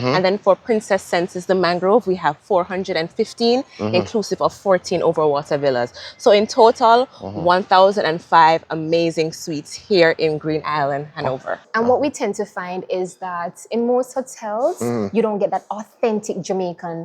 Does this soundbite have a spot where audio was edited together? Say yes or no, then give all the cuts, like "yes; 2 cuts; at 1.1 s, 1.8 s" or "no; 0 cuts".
yes; 1 cut; at 11.6 s